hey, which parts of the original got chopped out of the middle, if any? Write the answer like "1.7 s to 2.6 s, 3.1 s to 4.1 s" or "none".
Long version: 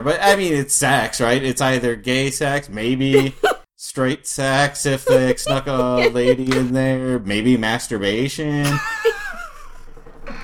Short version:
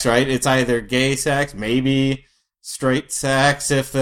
none